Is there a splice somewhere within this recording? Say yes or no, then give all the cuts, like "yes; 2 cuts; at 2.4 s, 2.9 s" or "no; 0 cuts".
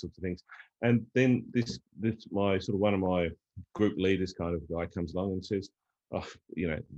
no; 0 cuts